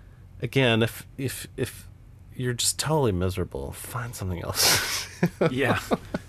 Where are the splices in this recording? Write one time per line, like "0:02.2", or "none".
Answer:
none